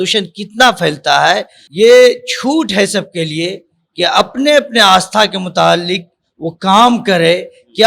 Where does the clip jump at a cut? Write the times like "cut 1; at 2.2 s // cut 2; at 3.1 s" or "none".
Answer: cut 1; at 1.6 s